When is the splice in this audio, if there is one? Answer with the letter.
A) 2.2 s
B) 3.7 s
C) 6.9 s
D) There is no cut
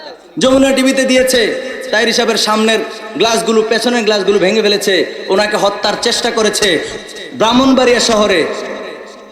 C